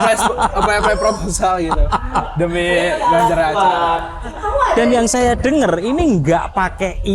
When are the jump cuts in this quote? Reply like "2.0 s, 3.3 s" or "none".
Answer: 4.2 s